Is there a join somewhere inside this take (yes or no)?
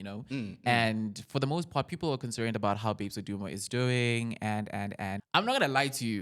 yes